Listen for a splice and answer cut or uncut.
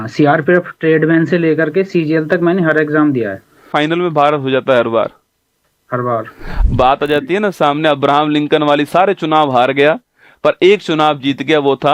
cut